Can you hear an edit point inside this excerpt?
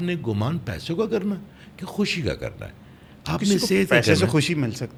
no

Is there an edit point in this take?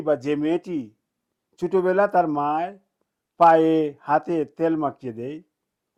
no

